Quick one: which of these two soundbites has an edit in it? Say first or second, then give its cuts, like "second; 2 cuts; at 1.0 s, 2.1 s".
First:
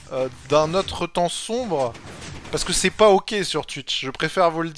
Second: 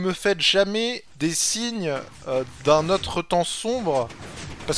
second; 1 cut; at 1.1 s